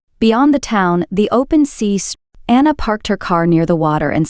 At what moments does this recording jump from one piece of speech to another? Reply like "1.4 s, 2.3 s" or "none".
2.1 s